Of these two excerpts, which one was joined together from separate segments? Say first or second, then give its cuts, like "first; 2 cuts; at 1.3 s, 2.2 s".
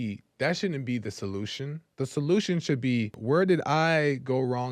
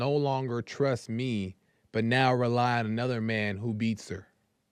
first; 2 cuts; at 1.8 s, 3.2 s